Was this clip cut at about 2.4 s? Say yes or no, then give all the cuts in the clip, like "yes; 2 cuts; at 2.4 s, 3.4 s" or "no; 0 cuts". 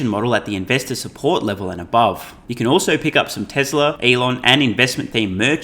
yes; 2 cuts; at 2.4 s, 4.0 s